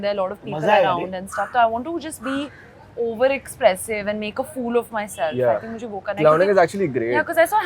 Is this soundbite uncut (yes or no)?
yes